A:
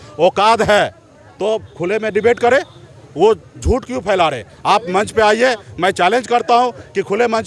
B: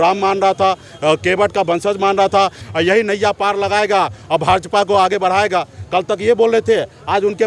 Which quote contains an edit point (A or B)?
B